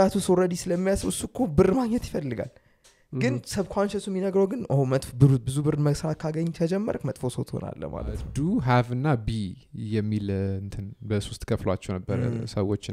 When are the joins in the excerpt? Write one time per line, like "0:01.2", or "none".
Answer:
0:08.3